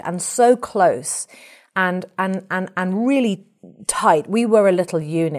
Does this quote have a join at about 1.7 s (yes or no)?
no